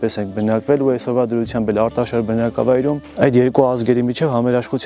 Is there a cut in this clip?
yes; 1 cut; at 3.1 s

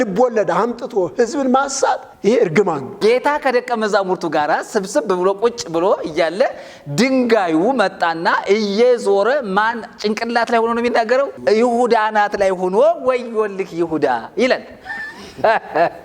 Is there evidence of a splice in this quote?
yes; 3 cuts; at 2.1 s, 2.9 s, 11.3 s

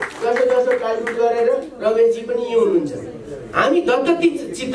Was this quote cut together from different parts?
no; 0 cuts

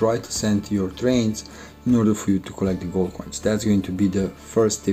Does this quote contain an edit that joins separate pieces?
no; 0 cuts

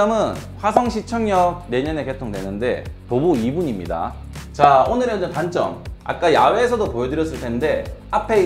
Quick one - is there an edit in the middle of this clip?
yes; 1 cut; at 4.6 s

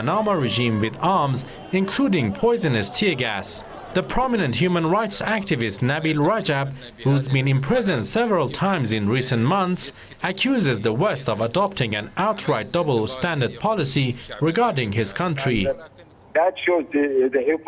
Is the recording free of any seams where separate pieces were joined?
yes; 0 cuts

